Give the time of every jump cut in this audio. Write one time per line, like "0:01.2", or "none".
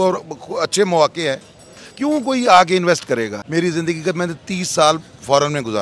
0:03.4